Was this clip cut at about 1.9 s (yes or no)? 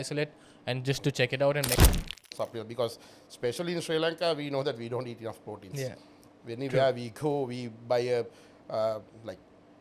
yes